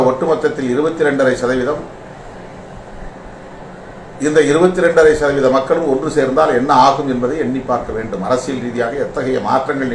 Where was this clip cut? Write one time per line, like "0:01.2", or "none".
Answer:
none